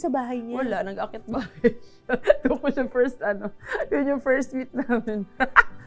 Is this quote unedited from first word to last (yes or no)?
yes